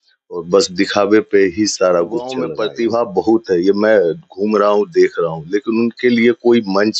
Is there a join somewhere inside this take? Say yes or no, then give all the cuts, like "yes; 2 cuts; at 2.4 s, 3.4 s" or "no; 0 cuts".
yes; 1 cut; at 2.5 s